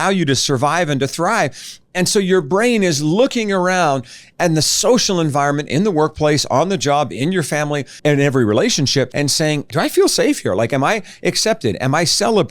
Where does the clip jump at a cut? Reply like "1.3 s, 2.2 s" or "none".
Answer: 8.0 s, 9.6 s